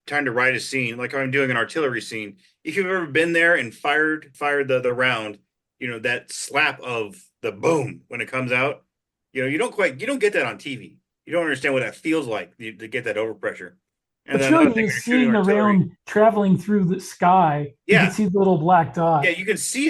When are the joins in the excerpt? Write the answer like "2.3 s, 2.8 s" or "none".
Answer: 4.3 s